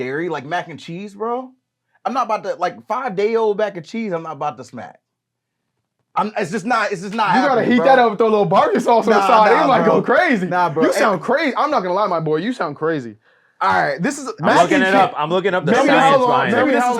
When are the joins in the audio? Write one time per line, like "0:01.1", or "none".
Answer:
none